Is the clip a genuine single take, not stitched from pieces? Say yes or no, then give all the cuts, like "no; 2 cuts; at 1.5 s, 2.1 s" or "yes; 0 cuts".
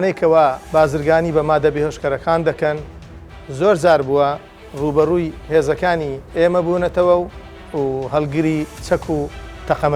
no; 2 cuts; at 7.6 s, 8.8 s